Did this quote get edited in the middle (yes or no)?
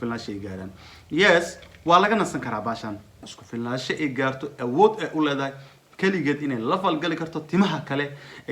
yes